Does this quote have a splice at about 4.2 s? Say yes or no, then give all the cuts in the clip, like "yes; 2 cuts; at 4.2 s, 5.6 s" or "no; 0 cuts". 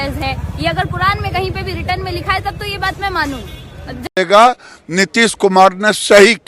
yes; 1 cut; at 4.2 s